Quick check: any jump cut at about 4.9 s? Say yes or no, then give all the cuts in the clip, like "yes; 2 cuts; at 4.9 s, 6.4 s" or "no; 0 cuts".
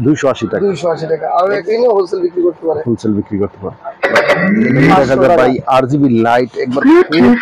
no; 1 cut; at 1.6 s